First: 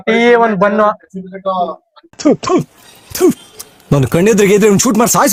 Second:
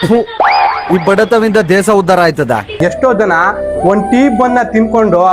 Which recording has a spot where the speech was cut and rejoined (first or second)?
second